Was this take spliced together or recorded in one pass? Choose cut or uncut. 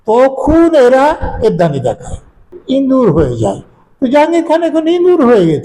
cut